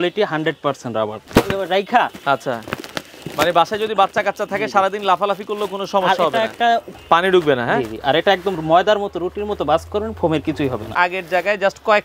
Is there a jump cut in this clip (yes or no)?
yes